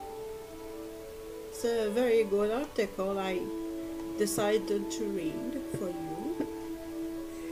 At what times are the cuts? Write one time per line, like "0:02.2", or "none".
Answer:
none